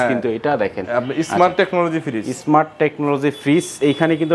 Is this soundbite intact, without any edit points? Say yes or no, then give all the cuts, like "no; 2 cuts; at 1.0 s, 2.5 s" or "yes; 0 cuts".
yes; 0 cuts